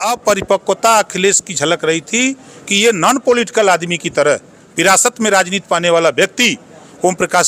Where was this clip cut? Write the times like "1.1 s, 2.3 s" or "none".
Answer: none